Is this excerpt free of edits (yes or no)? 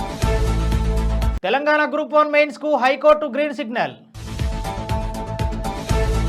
yes